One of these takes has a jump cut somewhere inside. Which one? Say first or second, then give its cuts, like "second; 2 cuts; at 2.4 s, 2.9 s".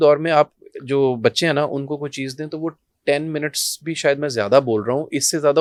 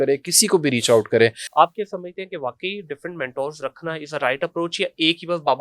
second; 1 cut; at 1.4 s